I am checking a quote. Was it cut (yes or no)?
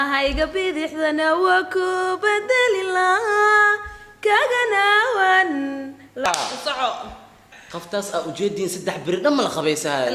yes